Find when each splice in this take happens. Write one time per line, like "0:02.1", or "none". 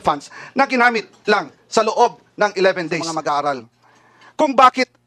0:03.1